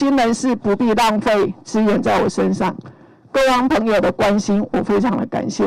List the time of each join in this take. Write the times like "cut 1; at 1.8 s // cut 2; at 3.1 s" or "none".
none